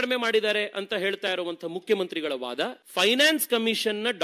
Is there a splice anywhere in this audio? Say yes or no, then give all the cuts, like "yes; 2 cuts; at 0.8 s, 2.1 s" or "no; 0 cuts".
yes; 1 cut; at 2.8 s